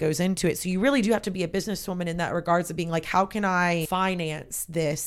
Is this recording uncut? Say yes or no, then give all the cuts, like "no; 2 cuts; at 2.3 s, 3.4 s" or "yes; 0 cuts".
no; 1 cut; at 3.9 s